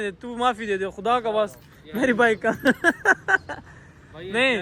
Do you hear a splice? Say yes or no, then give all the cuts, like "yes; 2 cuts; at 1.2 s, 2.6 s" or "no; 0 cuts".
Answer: no; 0 cuts